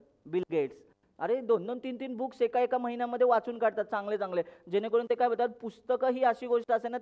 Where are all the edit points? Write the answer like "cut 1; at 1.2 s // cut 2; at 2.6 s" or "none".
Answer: none